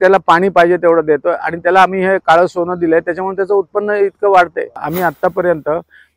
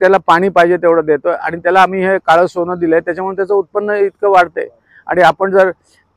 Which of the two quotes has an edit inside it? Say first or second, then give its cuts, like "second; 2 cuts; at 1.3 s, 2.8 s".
first; 1 cut; at 4.9 s